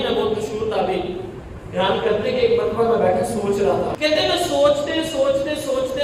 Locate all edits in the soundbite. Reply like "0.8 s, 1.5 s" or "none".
4.0 s